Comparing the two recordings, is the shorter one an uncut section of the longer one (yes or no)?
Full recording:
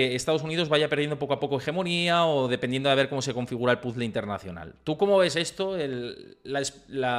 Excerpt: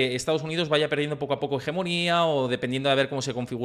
yes